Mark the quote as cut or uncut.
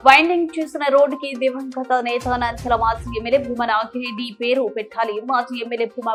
uncut